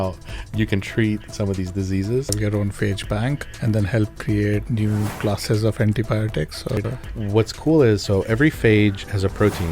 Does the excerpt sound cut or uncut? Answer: cut